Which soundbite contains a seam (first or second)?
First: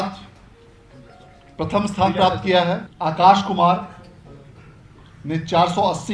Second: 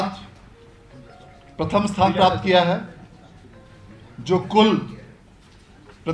first